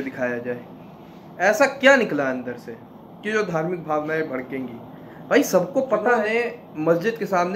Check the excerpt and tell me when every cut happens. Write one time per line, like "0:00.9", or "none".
0:06.3